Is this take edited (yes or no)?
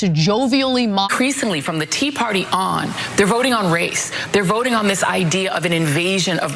yes